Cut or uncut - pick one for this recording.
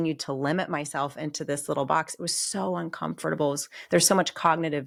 uncut